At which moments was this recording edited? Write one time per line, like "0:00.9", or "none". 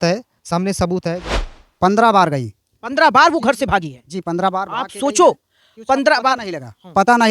0:01.3